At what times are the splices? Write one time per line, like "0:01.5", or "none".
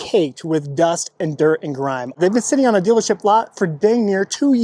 0:02.1